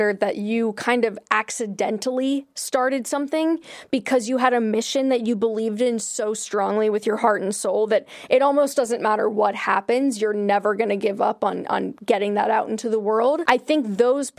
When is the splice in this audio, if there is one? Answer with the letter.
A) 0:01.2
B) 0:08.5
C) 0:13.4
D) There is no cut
C